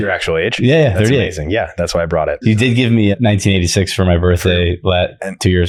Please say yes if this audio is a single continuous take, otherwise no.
yes